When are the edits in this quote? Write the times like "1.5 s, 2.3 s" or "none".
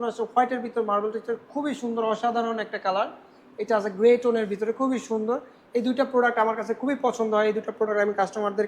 none